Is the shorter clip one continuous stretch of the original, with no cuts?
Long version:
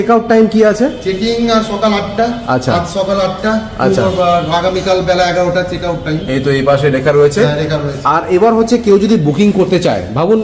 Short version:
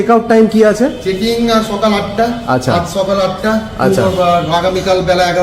yes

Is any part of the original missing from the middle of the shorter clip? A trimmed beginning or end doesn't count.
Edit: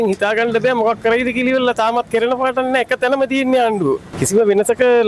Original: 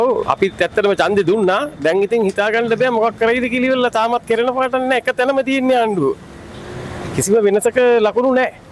yes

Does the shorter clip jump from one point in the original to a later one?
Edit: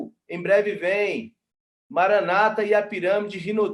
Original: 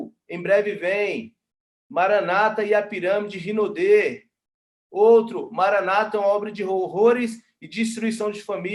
no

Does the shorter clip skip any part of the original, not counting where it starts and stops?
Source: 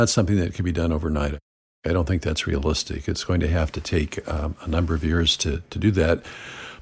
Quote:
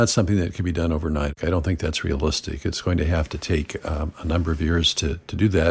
yes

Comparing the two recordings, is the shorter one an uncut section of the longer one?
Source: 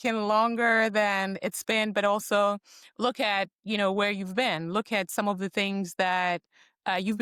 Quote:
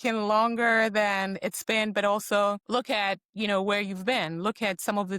no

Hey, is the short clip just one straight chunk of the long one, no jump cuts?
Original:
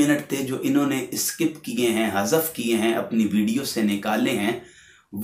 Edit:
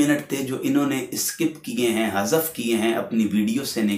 yes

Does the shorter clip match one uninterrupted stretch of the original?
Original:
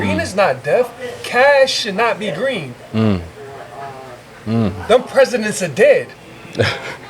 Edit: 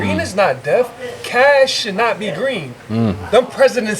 no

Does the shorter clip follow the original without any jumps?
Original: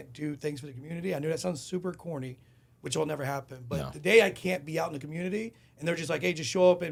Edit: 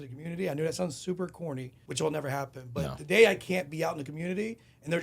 no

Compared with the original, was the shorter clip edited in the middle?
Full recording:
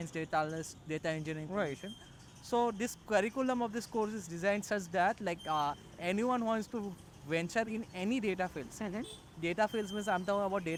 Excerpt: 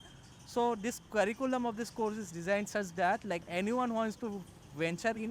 yes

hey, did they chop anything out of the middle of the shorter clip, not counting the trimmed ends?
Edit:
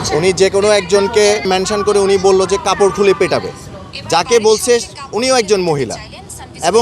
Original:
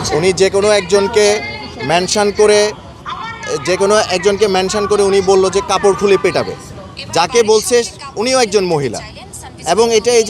yes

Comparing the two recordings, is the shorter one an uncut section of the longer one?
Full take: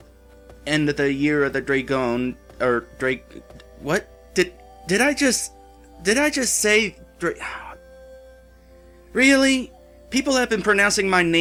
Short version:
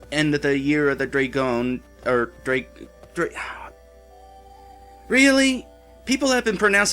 no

